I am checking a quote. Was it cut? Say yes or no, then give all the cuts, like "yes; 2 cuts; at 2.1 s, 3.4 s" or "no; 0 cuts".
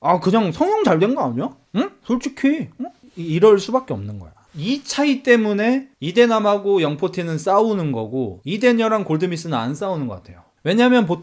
no; 0 cuts